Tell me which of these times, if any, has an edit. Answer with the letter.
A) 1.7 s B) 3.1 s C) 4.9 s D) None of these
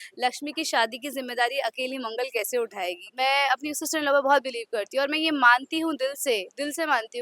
B